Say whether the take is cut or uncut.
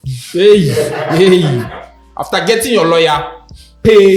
uncut